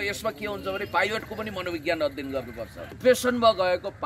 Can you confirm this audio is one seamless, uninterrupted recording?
no; 1 cut; at 3.0 s

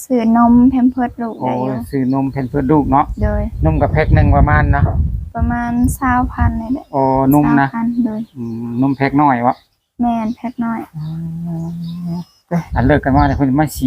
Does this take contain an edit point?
yes; 1 cut; at 12.7 s

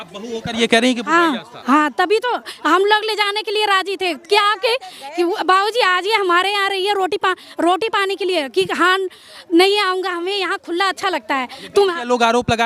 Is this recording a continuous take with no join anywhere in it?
yes; 0 cuts

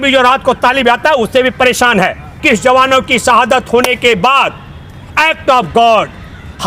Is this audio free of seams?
no; 1 cut; at 2.4 s

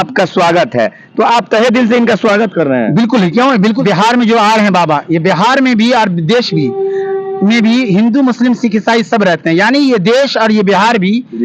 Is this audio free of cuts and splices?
no; 1 cut; at 3.8 s

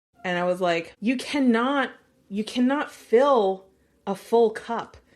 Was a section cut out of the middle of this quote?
yes; 1 cut; at 0.9 s

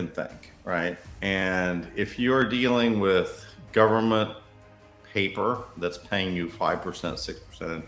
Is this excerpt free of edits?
no; 1 cut; at 1.1 s

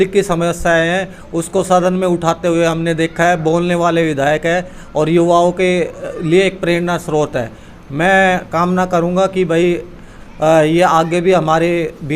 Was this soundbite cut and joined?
no; 0 cuts

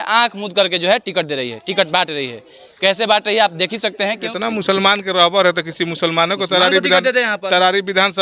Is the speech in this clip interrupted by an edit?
yes; 1 cut; at 4.3 s

